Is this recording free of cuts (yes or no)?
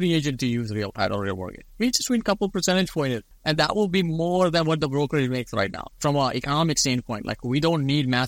no